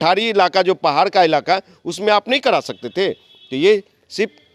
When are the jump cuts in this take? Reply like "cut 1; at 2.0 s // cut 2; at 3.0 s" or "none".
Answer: none